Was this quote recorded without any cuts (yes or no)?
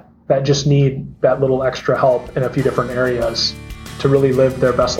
no